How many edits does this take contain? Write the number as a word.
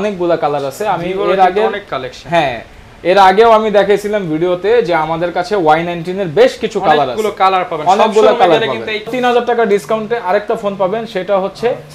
one